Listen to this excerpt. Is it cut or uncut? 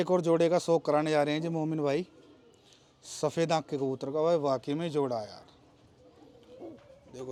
uncut